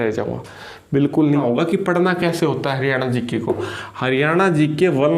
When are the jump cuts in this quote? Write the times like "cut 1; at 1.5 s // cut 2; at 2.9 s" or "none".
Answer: cut 1; at 1.4 s